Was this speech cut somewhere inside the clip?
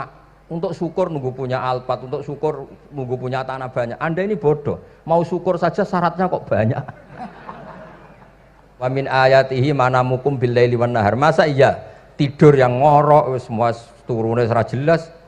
yes; 1 cut; at 8.9 s

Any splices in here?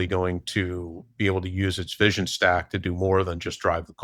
yes; 1 cut; at 1.0 s

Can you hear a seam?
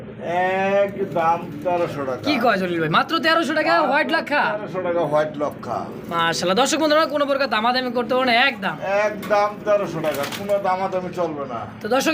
no; 0 cuts

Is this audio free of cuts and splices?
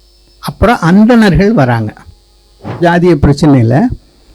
no; 1 cut; at 2.8 s

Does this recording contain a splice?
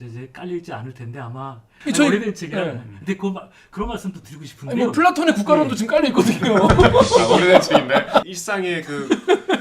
yes; 2 cuts; at 1.7 s, 8.3 s

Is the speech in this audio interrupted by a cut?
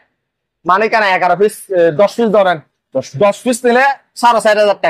no; 0 cuts

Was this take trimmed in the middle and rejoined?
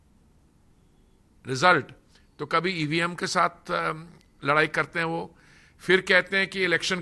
no; 0 cuts

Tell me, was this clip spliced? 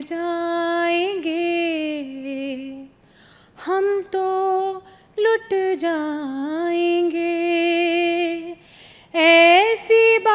no; 0 cuts

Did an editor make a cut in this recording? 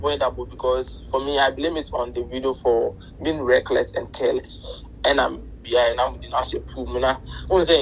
yes; 1 cut; at 5.5 s

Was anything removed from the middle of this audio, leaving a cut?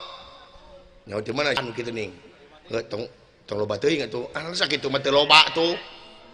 yes; 1 cut; at 1.6 s

